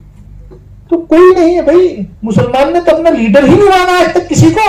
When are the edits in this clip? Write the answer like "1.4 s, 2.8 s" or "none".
none